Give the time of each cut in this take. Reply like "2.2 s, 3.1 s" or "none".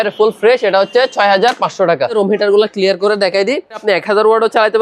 2.1 s, 3.7 s